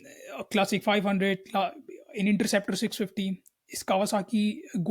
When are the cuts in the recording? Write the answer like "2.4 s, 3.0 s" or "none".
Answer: none